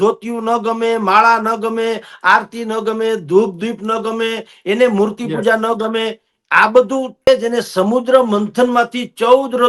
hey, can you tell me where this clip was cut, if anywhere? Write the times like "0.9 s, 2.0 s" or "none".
7.3 s